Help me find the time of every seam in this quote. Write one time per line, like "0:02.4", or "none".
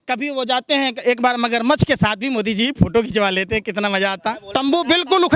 0:04.4